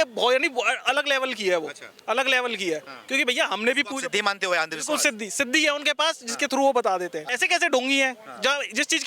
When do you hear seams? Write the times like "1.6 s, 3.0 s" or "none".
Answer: 7.3 s